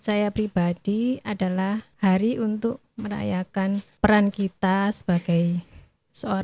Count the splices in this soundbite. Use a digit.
3